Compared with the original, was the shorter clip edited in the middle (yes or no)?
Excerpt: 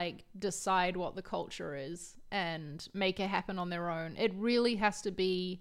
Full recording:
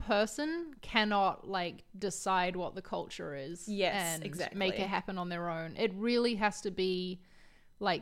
no